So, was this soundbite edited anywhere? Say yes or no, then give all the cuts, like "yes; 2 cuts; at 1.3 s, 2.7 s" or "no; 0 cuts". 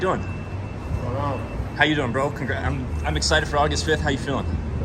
no; 0 cuts